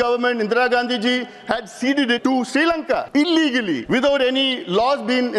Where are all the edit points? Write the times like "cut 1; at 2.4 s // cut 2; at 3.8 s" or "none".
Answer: cut 1; at 2.2 s // cut 2; at 3.1 s // cut 3; at 3.8 s